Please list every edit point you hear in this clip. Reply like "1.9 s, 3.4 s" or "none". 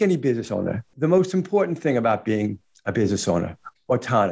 0.9 s